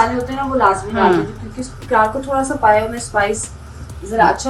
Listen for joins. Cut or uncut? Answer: uncut